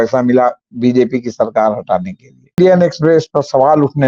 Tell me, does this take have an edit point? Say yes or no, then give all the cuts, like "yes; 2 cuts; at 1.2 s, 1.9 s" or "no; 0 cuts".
yes; 1 cut; at 2.6 s